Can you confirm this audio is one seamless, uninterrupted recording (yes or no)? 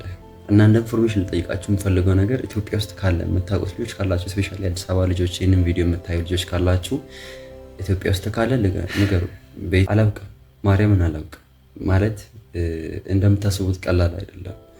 no